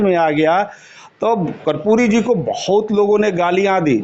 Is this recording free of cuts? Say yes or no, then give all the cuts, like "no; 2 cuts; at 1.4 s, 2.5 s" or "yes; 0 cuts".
yes; 0 cuts